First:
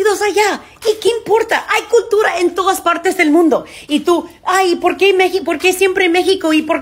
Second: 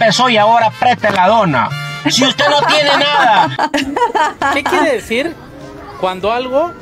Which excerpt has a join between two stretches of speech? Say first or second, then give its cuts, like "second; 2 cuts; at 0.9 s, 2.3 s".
second; 1 cut; at 3.7 s